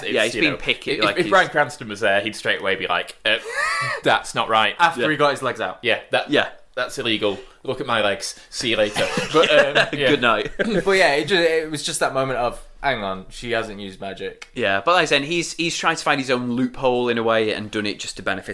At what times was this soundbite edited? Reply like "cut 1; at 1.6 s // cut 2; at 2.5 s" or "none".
none